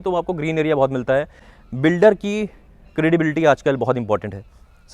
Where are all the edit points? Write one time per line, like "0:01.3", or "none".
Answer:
0:01.4